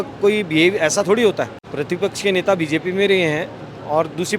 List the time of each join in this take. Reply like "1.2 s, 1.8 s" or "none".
1.6 s